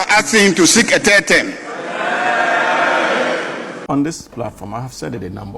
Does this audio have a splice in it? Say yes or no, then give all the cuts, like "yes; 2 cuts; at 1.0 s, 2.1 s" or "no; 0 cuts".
yes; 1 cut; at 3.7 s